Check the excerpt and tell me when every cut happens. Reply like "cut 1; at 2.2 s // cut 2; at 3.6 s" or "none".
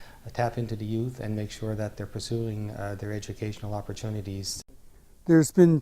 cut 1; at 4.6 s